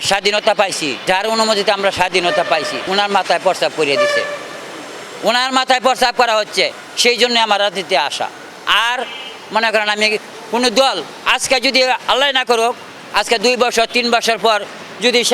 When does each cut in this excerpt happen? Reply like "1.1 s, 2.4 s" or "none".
0.9 s, 2.8 s